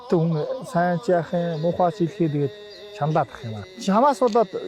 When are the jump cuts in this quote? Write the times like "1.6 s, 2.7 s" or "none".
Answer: none

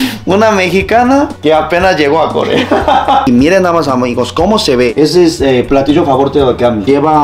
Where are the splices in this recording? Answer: 3.3 s

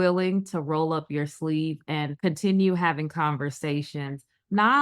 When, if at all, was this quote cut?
2.1 s

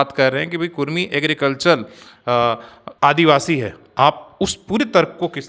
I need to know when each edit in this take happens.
none

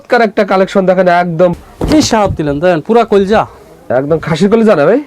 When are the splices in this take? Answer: 1.6 s

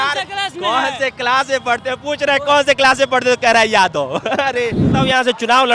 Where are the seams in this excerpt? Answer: 4.8 s

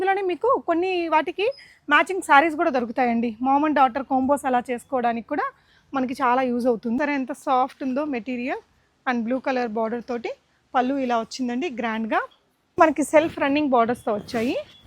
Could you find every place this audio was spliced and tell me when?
7.0 s, 12.8 s

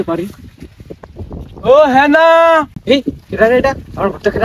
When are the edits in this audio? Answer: none

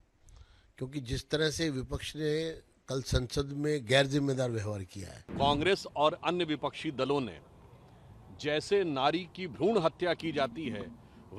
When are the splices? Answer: 5.2 s

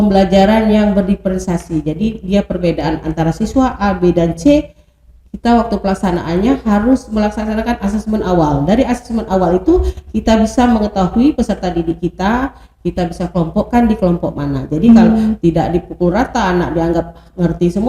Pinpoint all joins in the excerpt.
none

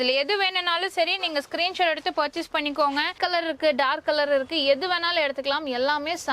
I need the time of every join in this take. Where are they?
3.1 s

